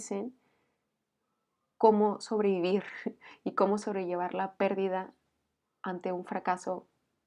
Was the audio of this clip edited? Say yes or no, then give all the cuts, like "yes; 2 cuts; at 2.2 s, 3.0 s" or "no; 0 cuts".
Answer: no; 0 cuts